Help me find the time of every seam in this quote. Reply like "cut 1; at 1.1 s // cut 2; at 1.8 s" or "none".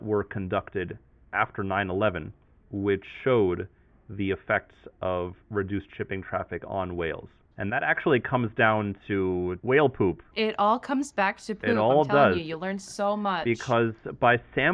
none